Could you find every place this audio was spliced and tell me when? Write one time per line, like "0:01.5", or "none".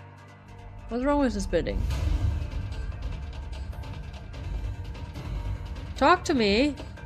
none